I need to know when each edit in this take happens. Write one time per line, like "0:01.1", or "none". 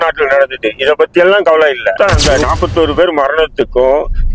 0:01.9